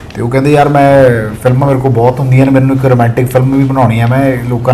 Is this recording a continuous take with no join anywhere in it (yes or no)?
yes